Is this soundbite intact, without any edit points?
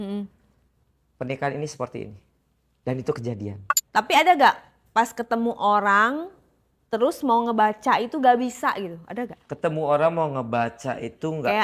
no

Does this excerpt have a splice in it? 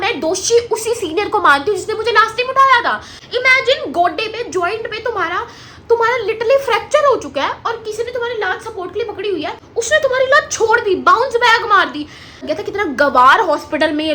yes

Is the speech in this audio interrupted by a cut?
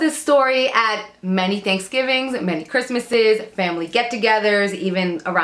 no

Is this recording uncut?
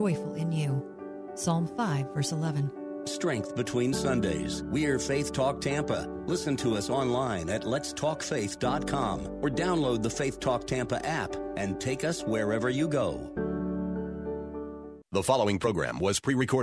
no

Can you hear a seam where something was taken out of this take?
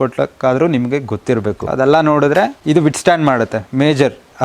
yes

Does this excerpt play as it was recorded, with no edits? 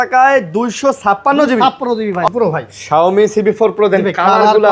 no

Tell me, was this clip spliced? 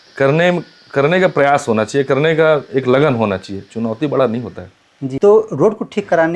yes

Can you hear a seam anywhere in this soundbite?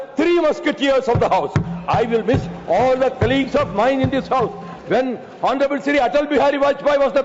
no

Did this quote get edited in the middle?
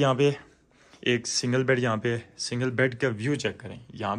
no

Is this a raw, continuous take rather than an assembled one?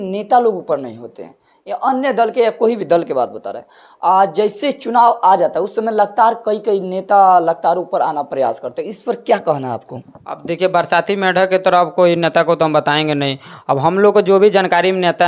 yes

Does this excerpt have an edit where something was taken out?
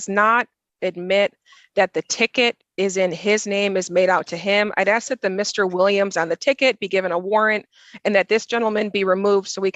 no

